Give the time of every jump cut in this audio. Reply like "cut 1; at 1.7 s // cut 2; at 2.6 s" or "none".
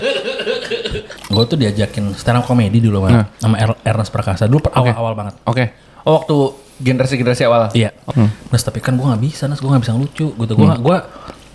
cut 1; at 1.1 s // cut 2; at 8.1 s

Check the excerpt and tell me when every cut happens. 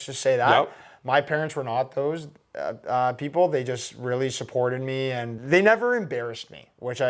cut 1; at 5.3 s

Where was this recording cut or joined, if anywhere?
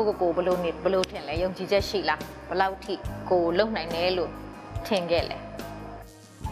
cut 1; at 1.5 s

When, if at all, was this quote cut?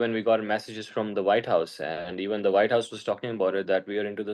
none

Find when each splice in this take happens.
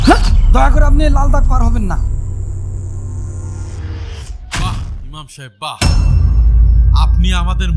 cut 1; at 4.8 s

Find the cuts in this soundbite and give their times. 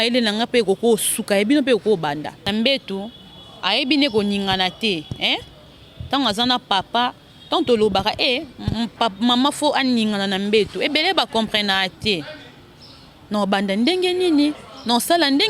cut 1; at 2.3 s

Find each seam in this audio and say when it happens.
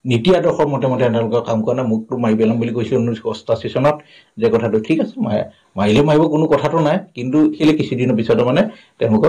cut 1; at 7.6 s

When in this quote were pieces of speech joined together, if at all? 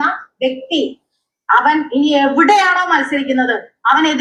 none

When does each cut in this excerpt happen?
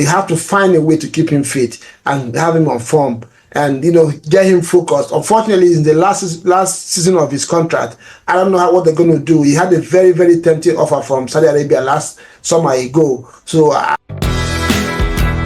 cut 1; at 14.0 s

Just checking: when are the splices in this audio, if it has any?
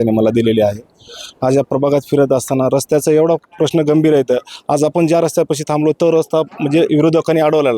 none

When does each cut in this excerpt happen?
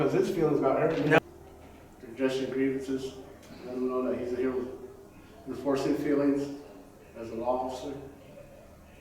cut 1; at 1.2 s

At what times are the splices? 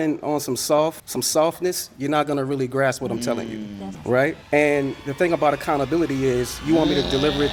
none

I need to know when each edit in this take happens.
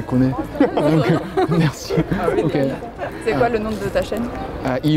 none

